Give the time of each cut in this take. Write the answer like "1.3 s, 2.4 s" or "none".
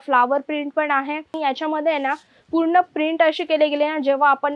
1.3 s